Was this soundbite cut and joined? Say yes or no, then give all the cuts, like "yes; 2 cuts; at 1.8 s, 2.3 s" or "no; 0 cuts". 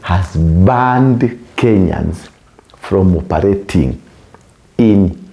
no; 0 cuts